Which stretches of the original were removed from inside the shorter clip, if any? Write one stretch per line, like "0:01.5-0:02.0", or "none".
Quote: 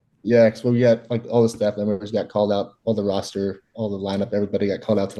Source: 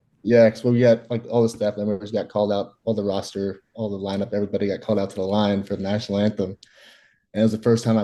none